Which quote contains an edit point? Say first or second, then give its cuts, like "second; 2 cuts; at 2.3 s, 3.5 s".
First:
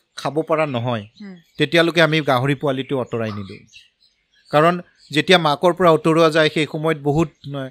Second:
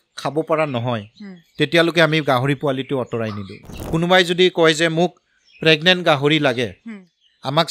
second; 1 cut; at 3.8 s